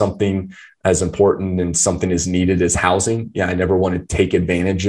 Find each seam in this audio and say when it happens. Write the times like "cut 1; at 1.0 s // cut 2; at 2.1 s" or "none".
none

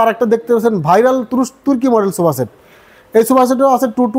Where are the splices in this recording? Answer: none

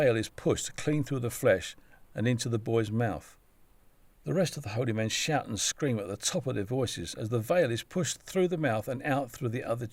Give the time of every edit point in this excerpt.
none

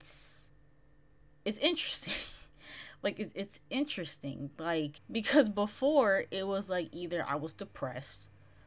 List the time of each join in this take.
cut 1; at 5.0 s

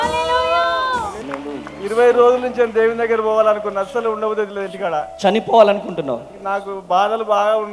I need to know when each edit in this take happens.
cut 1; at 1.2 s

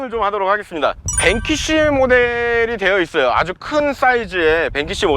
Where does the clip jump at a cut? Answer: cut 1; at 1.0 s

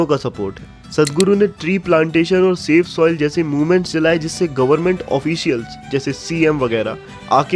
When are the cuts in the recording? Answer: none

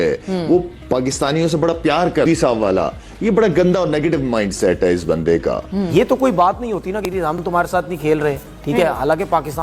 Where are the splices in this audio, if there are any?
cut 1; at 2.3 s // cut 2; at 5.9 s

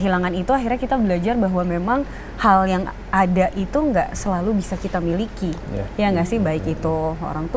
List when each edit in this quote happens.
none

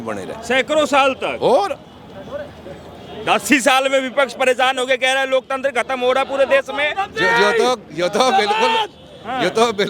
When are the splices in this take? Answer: none

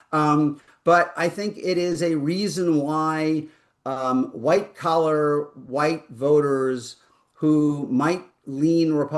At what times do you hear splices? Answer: none

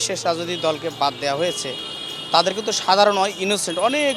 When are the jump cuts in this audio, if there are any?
none

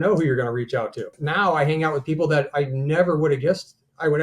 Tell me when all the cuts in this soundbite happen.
cut 1; at 1.2 s

